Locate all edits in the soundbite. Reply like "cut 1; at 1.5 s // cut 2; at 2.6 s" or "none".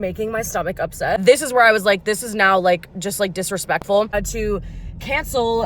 cut 1; at 1.2 s // cut 2; at 4.1 s